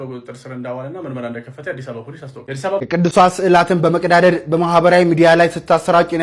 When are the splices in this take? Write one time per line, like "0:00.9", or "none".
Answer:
0:02.8